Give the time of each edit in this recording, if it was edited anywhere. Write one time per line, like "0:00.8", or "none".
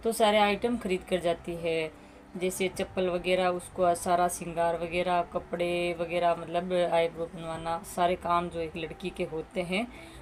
none

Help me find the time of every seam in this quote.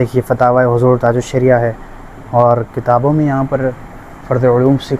none

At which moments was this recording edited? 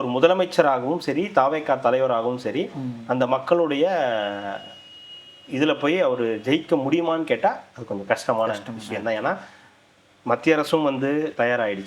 none

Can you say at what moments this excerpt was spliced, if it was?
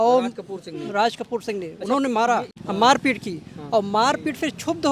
0:02.5

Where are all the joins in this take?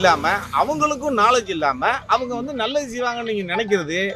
none

